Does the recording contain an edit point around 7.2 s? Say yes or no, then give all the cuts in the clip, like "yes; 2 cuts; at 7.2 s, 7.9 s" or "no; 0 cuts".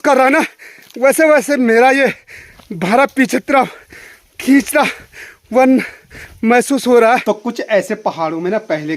yes; 1 cut; at 7.2 s